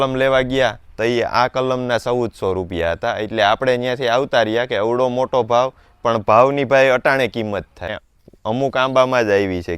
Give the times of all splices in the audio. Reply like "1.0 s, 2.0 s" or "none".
7.9 s